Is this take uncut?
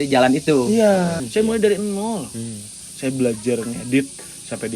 no; 1 cut; at 1.2 s

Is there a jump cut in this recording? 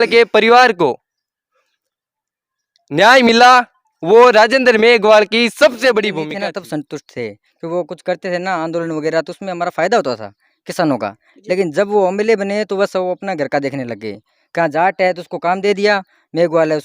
yes; 1 cut; at 6.3 s

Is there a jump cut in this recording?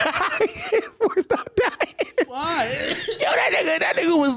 yes; 1 cut; at 2.3 s

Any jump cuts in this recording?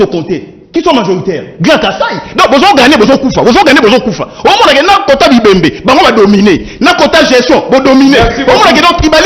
no; 0 cuts

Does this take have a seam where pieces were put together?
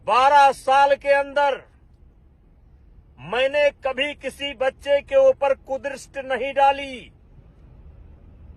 yes; 1 cut; at 7.2 s

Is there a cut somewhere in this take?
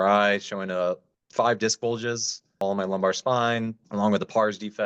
yes; 2 cuts; at 2.6 s, 3.8 s

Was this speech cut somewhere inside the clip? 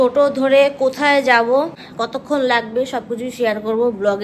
yes; 1 cut; at 1.8 s

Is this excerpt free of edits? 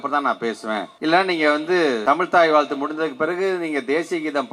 no; 2 cuts; at 0.9 s, 2.0 s

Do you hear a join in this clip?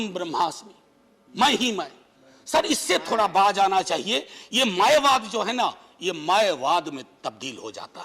no; 0 cuts

